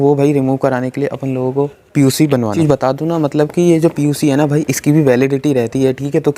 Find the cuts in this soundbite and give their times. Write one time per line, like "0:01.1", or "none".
0:02.5